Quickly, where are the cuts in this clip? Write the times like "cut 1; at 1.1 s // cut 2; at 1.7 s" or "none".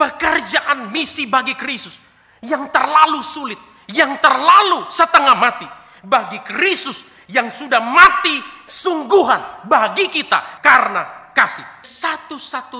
cut 1; at 11.8 s